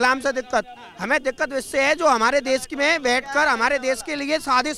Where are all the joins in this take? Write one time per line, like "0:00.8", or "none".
none